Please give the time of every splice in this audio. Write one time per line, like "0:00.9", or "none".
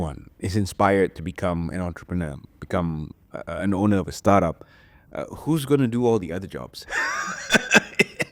none